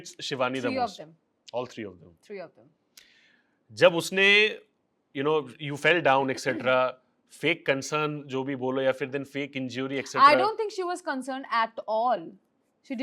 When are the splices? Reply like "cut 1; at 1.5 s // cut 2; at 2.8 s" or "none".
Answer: none